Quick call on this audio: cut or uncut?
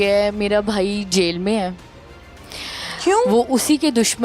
uncut